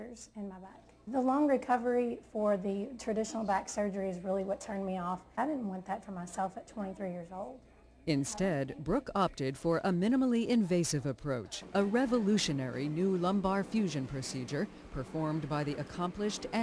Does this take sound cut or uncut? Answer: uncut